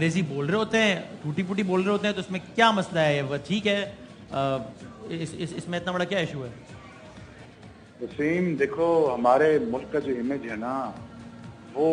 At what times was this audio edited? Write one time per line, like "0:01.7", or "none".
none